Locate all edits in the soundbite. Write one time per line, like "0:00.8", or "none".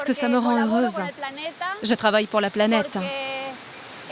0:03.1

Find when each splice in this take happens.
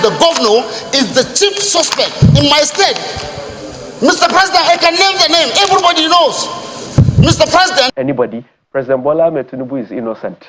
0:07.9

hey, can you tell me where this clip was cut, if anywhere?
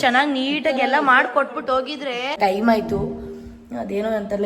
0:02.4

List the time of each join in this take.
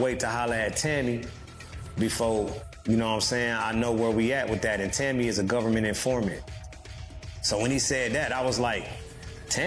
0:01.5

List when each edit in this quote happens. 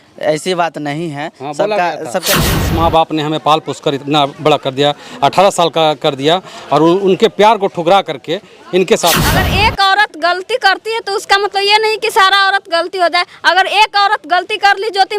0:02.6
0:09.4

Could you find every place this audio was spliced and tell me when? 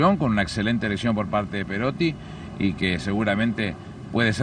none

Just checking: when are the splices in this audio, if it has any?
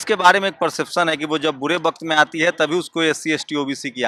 none

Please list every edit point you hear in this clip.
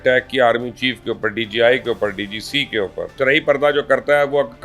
0:03.1

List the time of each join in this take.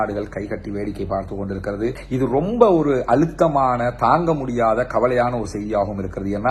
0:02.0

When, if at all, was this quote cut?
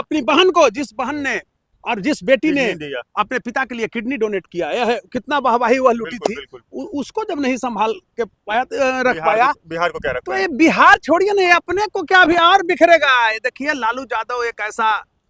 none

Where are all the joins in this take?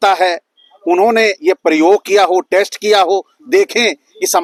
none

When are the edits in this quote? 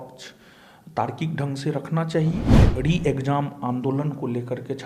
0:02.6

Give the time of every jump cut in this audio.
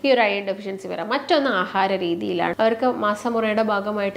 0:02.5

